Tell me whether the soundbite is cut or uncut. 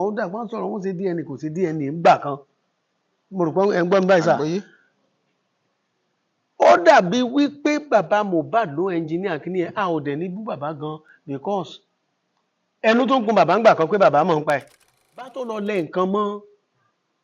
cut